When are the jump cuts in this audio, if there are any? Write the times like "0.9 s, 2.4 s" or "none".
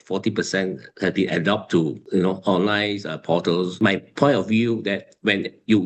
3.7 s